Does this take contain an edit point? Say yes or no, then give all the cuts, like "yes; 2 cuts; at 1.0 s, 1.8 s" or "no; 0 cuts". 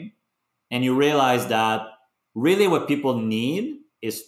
no; 0 cuts